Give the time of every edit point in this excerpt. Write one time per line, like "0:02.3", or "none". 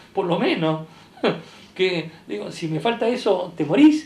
none